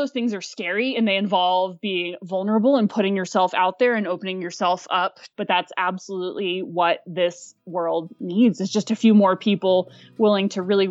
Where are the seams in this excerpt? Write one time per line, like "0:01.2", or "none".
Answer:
0:05.2